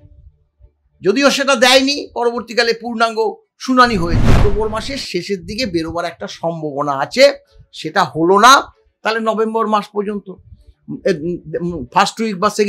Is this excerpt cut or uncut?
cut